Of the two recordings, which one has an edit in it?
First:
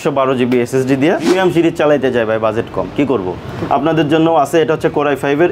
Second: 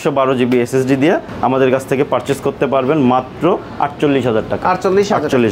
first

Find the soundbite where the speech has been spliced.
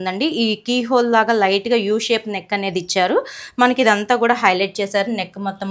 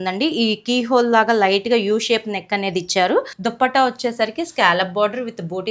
second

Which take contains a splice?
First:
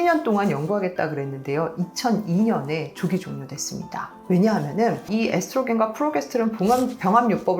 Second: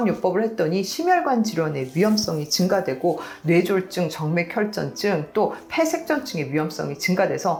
first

